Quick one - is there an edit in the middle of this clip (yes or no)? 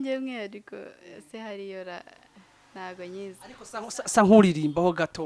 no